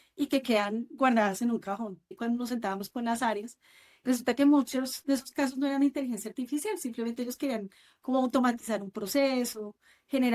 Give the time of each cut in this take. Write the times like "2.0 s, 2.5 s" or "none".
2.1 s